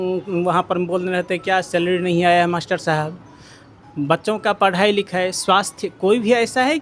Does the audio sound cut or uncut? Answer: uncut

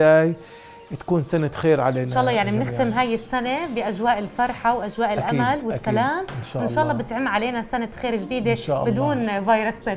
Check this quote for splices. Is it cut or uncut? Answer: uncut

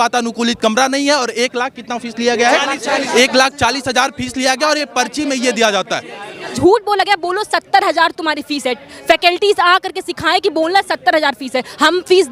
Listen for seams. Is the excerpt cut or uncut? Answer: cut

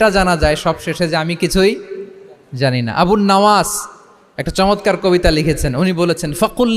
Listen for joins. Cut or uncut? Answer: uncut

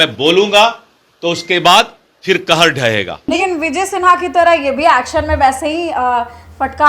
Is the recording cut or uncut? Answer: cut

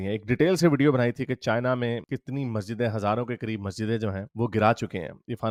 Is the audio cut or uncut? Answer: uncut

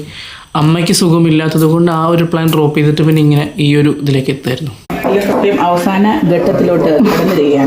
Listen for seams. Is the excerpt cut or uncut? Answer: cut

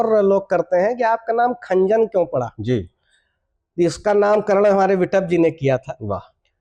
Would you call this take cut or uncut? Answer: uncut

